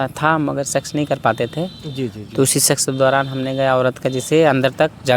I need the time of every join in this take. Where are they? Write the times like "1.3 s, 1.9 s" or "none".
none